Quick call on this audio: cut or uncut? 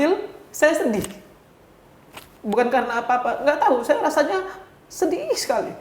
uncut